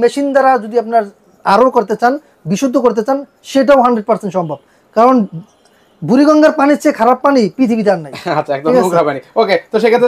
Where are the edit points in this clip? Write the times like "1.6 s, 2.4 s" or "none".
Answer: none

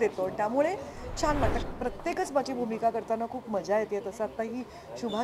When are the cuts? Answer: 1.6 s

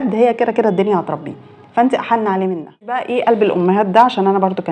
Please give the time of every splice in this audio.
3.1 s

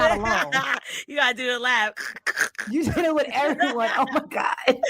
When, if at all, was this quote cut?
none

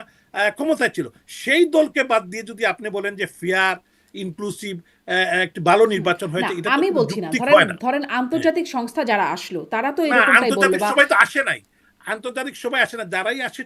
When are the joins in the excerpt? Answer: none

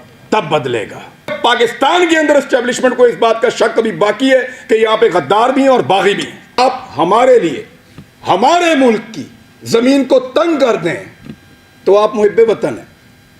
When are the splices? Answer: 1.3 s, 6.6 s

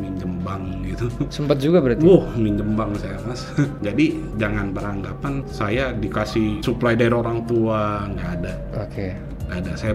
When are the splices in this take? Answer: 1.3 s, 3.8 s, 5.5 s, 6.6 s

